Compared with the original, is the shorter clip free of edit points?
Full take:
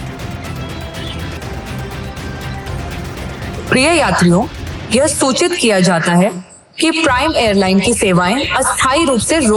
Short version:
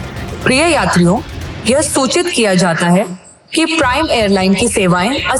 yes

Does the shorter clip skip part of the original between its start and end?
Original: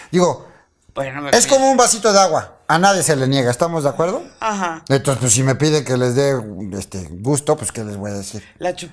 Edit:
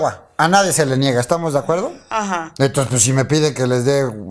no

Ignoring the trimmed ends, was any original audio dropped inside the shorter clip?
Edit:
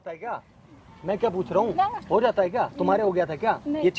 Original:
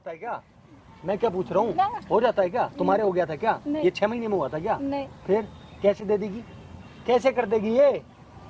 no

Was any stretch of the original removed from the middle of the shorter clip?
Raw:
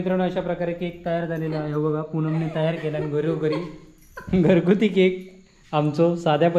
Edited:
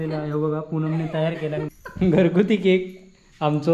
yes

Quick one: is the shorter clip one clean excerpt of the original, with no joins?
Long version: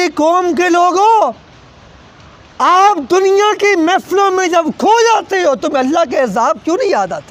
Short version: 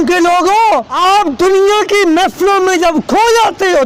no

